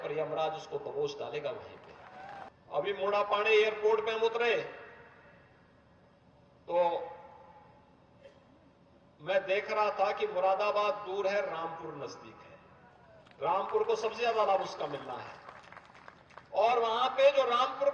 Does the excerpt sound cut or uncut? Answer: cut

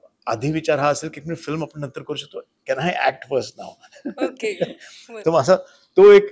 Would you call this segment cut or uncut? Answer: uncut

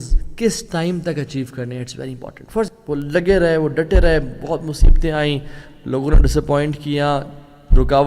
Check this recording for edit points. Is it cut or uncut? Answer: cut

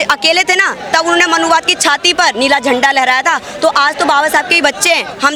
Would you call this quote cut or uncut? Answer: uncut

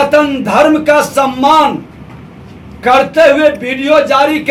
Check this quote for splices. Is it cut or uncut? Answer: uncut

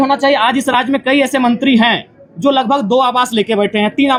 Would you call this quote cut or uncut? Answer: uncut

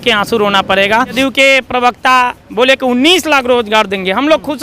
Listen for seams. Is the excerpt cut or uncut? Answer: cut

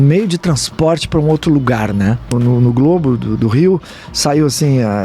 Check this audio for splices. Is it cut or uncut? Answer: cut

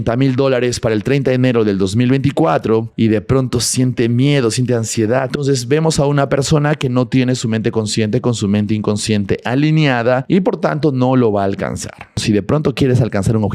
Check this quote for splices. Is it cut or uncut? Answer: cut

